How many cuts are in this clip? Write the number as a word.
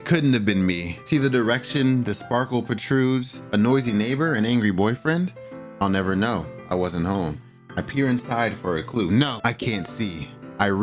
three